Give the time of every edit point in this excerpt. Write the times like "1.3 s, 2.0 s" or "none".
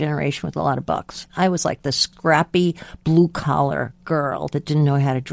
1.2 s, 2.1 s